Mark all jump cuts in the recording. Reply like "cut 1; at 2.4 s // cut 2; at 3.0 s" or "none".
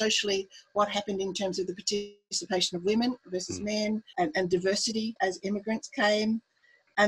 cut 1; at 4.1 s // cut 2; at 5.2 s